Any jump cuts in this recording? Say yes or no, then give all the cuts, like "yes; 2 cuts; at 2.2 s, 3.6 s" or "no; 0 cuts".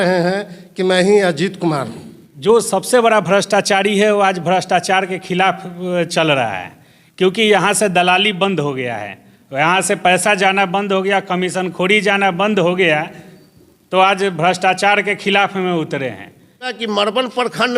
yes; 2 cuts; at 2.2 s, 16.8 s